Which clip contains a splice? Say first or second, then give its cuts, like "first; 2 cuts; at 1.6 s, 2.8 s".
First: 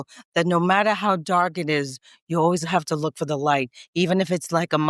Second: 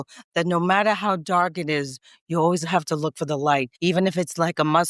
second; 1 cut; at 3.7 s